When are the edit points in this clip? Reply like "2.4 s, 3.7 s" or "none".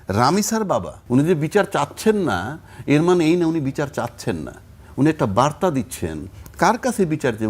1.0 s